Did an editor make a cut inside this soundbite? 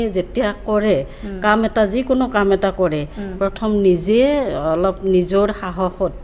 no; 0 cuts

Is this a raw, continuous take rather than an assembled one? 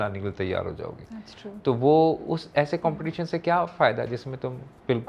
yes; 0 cuts

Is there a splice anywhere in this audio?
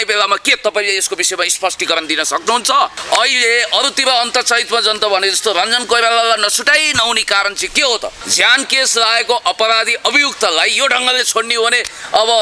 yes; 2 cuts; at 3.0 s, 8.2 s

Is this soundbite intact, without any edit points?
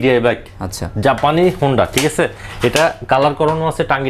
yes; 0 cuts

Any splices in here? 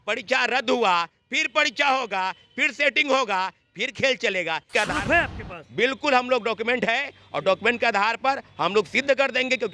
yes; 1 cut; at 4.7 s

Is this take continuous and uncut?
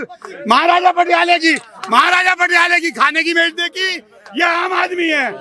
yes; 0 cuts

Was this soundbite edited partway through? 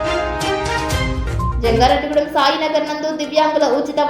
yes; 1 cut; at 1.5 s

